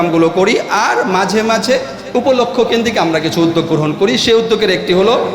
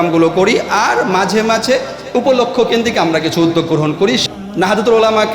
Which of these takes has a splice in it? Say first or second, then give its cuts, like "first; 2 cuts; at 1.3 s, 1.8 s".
second; 1 cut; at 4.2 s